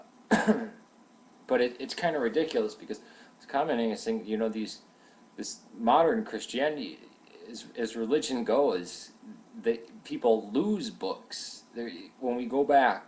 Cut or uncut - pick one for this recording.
cut